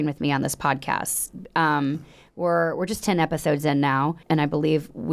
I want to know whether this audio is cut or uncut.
cut